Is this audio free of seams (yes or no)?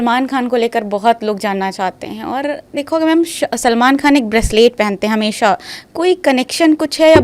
yes